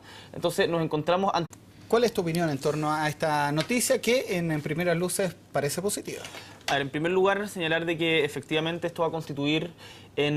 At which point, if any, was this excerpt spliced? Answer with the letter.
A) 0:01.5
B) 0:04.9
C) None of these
C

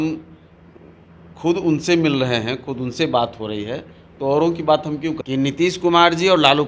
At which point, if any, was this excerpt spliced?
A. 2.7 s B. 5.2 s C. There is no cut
B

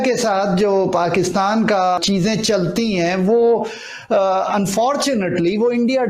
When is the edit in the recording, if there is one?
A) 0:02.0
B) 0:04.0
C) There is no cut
A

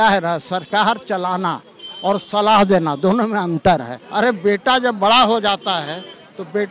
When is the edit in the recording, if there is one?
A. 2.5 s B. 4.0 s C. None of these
B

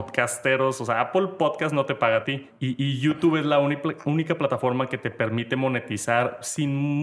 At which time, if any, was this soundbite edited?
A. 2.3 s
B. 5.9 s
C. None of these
A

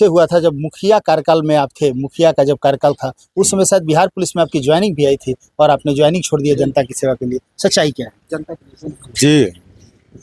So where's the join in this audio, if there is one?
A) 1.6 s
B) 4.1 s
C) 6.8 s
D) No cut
D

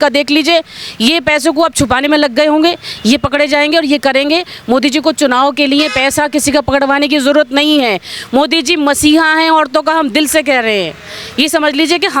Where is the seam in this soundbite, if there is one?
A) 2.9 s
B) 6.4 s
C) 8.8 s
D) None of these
D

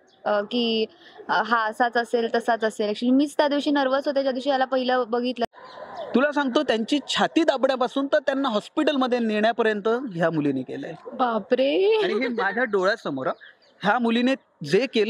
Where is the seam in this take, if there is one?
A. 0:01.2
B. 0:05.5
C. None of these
B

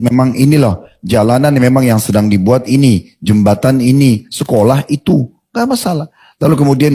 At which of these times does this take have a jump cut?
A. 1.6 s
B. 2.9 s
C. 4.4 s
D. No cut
D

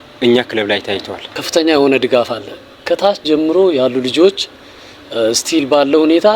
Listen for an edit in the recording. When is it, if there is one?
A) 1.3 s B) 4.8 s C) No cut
A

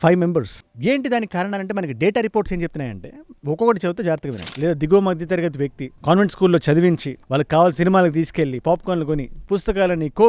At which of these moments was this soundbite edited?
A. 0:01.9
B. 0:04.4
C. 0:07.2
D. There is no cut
B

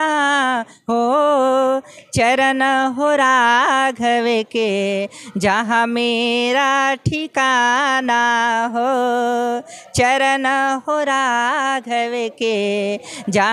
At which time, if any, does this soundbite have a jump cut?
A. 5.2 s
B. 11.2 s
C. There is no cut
C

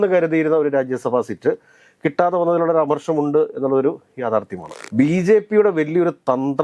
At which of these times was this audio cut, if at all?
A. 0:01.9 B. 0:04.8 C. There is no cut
B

